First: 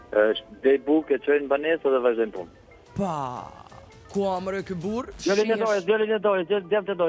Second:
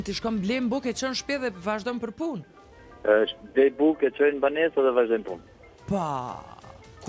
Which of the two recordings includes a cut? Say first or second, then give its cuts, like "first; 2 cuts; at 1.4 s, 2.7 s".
first; 1 cut; at 5.1 s